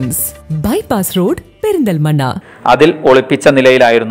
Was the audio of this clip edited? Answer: yes; 1 cut; at 2.2 s

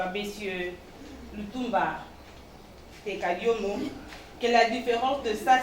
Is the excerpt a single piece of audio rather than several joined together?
no; 1 cut; at 4.0 s

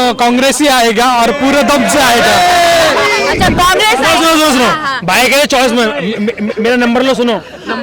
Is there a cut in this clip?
no; 0 cuts

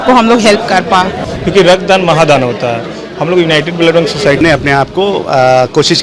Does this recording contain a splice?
yes; 2 cuts; at 1.2 s, 4.4 s

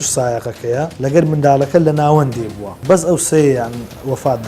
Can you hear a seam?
yes; 2 cuts; at 0.9 s, 2.7 s

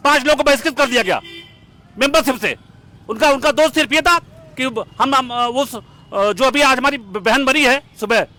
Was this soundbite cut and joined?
no; 0 cuts

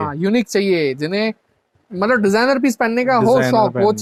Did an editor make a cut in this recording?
no; 0 cuts

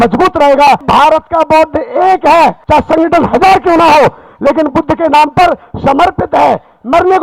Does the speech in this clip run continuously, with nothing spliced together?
no; 2 cuts; at 0.8 s, 2.6 s

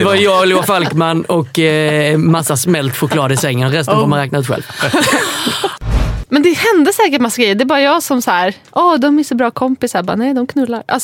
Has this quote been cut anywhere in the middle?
yes; 1 cut; at 5.8 s

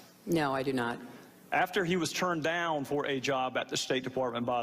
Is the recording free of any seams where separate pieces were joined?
yes; 0 cuts

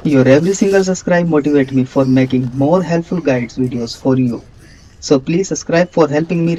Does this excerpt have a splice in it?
yes; 1 cut; at 4.6 s

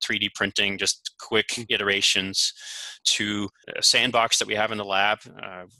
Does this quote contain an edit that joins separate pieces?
yes; 1 cut; at 3.7 s

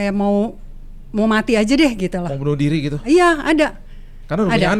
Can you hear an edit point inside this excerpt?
no; 0 cuts

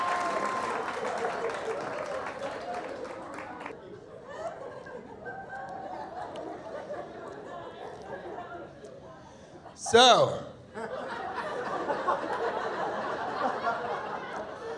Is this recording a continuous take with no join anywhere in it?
no; 1 cut; at 3.7 s

